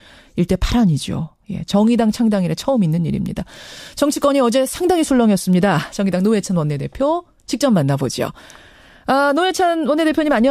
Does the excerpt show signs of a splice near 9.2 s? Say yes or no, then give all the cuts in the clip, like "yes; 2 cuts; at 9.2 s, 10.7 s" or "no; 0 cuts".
no; 1 cut; at 4.5 s